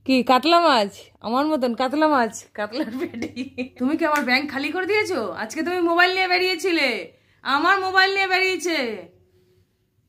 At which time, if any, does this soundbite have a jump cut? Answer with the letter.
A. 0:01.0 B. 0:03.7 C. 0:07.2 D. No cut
B